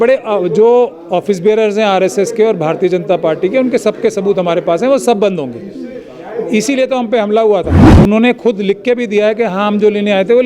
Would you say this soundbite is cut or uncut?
cut